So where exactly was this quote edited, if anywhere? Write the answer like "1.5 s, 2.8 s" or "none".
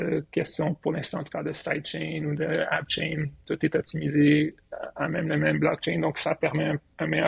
none